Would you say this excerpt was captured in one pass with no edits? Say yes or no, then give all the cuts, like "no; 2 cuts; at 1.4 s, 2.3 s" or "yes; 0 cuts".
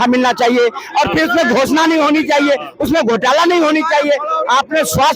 yes; 0 cuts